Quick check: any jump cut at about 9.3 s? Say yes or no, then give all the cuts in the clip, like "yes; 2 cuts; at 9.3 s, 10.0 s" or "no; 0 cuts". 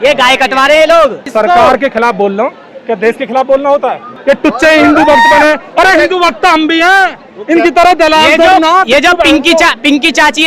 no; 2 cuts; at 1.3 s, 4.1 s